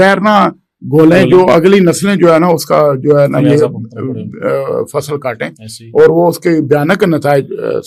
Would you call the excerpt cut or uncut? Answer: uncut